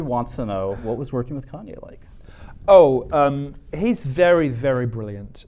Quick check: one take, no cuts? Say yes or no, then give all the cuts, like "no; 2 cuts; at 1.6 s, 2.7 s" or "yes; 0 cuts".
yes; 0 cuts